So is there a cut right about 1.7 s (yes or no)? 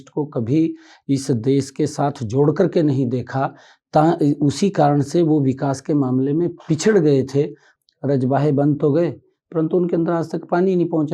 no